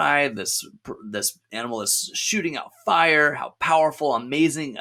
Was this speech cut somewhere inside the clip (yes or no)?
no